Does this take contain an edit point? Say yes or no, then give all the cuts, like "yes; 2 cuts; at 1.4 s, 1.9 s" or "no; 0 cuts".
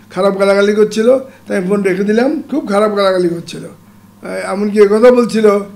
yes; 1 cut; at 2.4 s